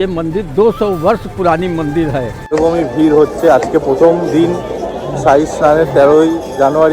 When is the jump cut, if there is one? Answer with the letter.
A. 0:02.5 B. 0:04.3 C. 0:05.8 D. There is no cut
A